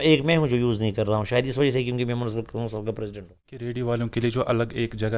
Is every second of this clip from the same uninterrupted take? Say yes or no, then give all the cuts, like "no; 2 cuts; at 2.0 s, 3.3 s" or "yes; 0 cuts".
no; 1 cut; at 3.7 s